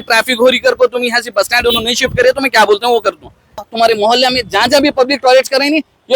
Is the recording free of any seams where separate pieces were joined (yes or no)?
no